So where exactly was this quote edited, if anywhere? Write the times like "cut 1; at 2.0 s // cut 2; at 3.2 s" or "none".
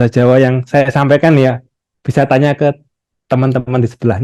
none